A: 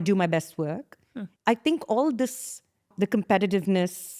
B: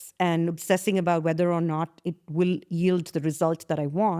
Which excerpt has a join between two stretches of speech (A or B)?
A